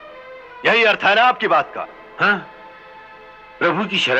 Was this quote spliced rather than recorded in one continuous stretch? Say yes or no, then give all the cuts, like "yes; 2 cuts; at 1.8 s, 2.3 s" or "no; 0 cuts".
no; 0 cuts